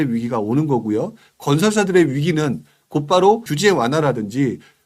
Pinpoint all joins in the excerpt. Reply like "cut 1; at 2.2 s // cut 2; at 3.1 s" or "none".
cut 1; at 3.5 s